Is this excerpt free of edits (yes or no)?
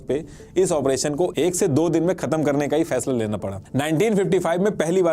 no